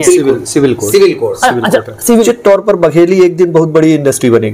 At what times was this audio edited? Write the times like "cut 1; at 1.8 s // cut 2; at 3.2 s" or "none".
cut 1; at 2.2 s